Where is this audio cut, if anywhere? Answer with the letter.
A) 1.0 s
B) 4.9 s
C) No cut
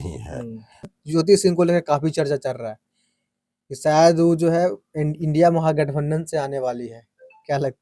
A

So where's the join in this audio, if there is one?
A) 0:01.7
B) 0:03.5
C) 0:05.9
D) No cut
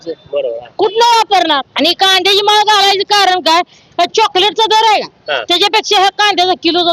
A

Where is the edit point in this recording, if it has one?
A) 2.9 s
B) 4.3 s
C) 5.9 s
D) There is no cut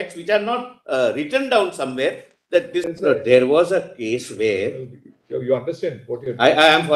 A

